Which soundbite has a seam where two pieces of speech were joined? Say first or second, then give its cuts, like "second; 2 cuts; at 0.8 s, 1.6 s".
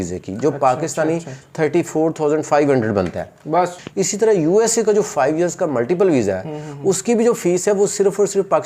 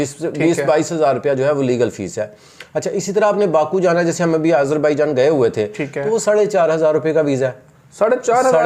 first; 1 cut; at 3.8 s